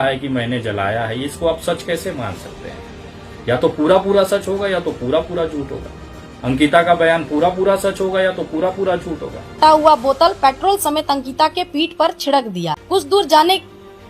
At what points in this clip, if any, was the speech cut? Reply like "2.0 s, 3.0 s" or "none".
9.6 s, 12.7 s

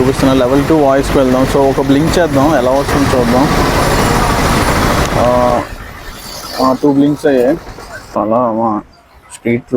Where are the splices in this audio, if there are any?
8.2 s

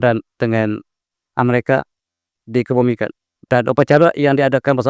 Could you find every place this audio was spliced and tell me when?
3.3 s

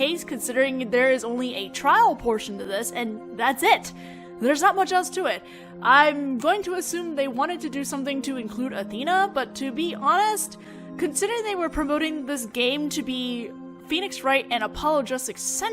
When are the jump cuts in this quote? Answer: 6.6 s

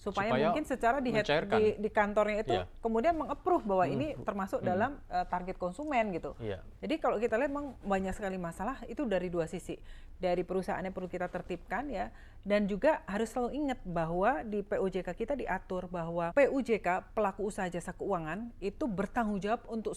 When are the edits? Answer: 6.7 s, 16.3 s

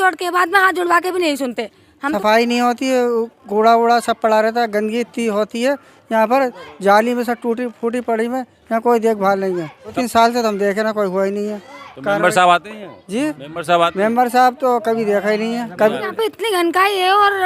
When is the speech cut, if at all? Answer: 2.1 s, 10.0 s, 16.1 s

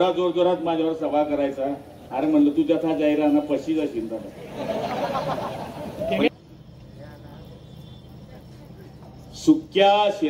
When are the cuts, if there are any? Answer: 6.3 s

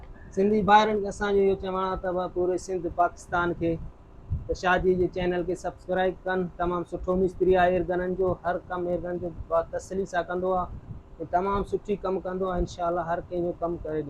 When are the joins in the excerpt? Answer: none

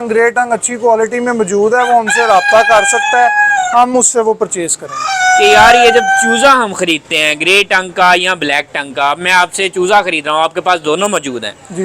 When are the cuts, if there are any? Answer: 5.0 s

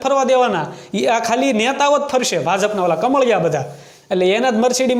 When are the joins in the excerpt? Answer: none

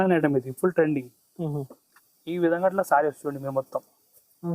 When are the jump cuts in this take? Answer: 1.8 s

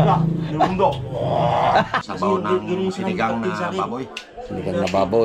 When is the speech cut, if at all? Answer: 2.0 s

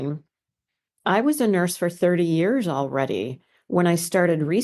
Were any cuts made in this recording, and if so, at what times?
none

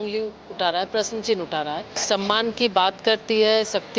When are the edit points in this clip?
1.9 s

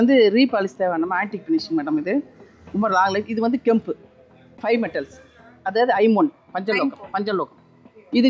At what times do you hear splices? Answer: 4.6 s

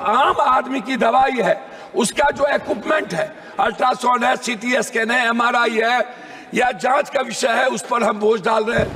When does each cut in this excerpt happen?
none

